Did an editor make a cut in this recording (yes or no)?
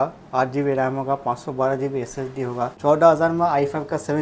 yes